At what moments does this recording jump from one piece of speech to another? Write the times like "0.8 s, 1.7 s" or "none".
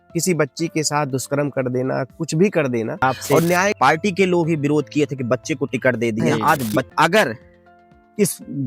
3.8 s, 6.9 s